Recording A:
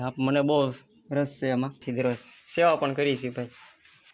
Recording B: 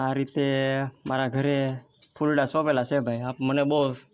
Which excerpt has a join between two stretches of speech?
A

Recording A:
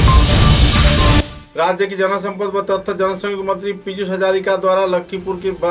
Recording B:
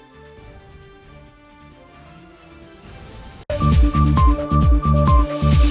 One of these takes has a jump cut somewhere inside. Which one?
A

